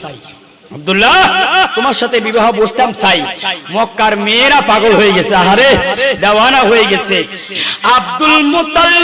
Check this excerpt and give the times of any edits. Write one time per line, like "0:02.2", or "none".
0:07.6

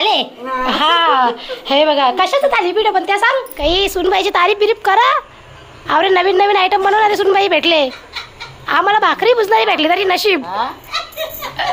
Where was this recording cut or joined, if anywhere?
0:03.5

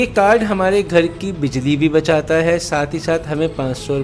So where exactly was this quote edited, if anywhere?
none

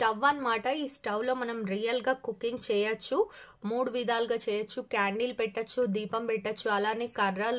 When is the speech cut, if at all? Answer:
none

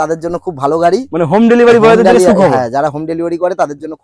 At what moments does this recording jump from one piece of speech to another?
none

